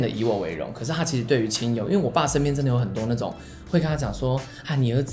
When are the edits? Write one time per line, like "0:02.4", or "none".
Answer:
none